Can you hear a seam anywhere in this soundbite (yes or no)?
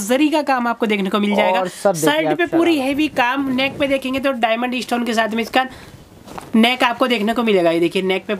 no